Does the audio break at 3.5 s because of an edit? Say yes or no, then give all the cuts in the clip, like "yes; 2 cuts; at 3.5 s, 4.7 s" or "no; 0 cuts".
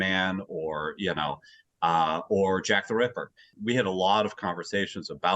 yes; 1 cut; at 3.5 s